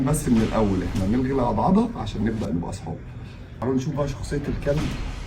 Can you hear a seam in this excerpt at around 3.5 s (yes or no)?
yes